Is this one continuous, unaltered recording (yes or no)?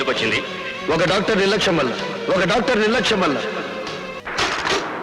no